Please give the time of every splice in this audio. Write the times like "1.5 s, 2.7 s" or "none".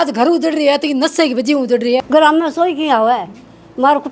2.0 s

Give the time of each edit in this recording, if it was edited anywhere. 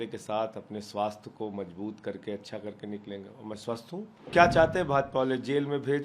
4.3 s

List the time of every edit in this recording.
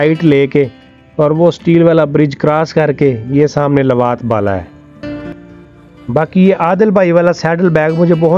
5.0 s

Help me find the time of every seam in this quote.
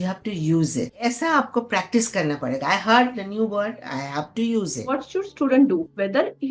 0.9 s, 5.0 s

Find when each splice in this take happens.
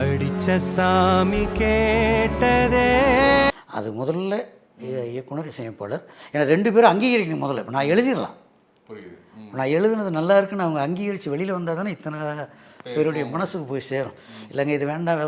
none

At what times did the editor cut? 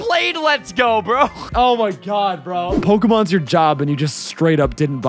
1.5 s, 2.8 s

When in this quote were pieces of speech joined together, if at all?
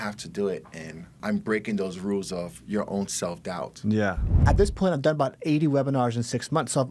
1.2 s, 4.4 s

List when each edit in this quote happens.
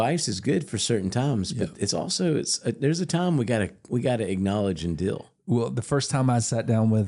none

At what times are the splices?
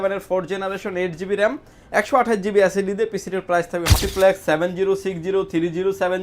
4.0 s

